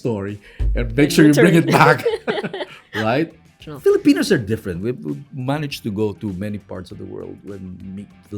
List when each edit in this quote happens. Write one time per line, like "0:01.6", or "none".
0:03.6